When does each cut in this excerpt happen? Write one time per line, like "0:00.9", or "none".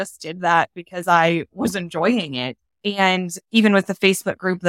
none